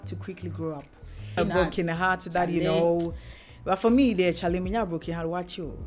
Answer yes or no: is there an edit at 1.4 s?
yes